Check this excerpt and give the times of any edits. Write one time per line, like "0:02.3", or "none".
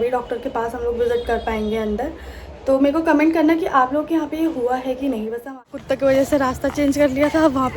0:05.8